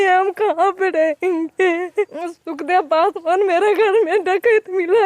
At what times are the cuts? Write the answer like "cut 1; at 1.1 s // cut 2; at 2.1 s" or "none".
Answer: cut 1; at 2.1 s